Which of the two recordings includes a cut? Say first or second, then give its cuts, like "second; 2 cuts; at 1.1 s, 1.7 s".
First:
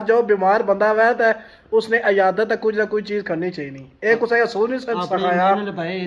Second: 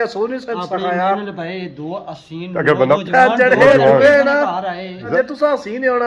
second; 2 cuts; at 3.0 s, 5.0 s